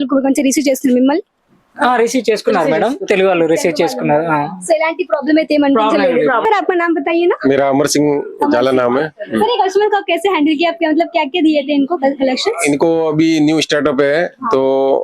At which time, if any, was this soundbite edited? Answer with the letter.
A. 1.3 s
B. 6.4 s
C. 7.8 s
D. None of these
B